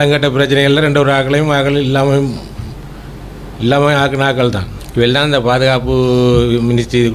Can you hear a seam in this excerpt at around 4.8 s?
yes; 1 cut; at 4.8 s

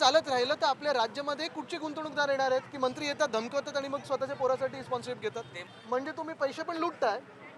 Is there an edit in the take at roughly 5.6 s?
yes; 1 cut; at 5.6 s

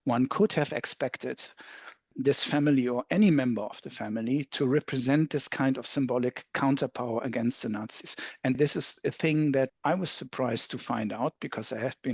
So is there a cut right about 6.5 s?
no; 3 cuts; at 2.1 s, 8.6 s, 9.7 s

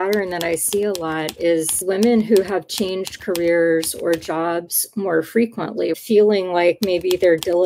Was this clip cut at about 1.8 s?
yes; 2 cuts; at 1.8 s, 5.9 s

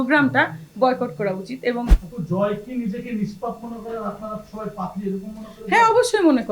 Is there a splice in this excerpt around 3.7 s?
no; 1 cut; at 2.1 s

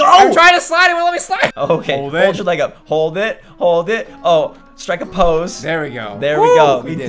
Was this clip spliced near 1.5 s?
yes; 1 cut; at 1.5 s

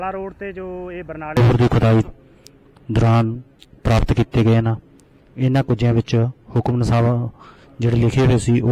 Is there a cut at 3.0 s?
no; 1 cut; at 1.4 s

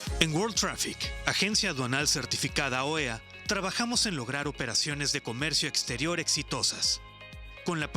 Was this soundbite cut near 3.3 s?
yes; 1 cut; at 3.3 s

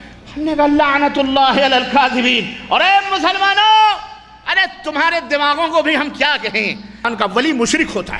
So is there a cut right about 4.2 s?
no; 1 cut; at 7.1 s

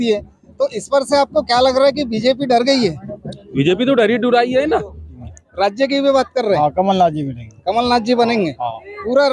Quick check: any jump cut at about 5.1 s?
yes; 1 cut; at 5.1 s

